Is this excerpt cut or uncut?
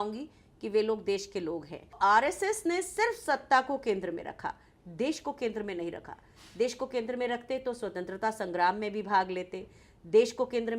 cut